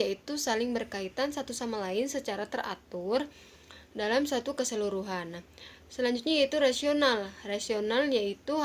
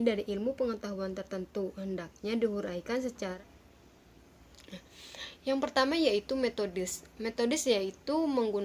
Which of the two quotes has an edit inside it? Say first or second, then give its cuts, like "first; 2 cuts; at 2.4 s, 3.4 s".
second; 1 cut; at 3.3 s